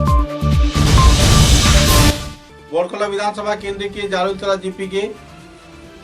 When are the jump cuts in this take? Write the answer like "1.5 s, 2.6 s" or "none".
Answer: 2.0 s